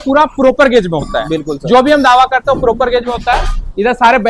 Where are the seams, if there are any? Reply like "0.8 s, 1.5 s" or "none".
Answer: none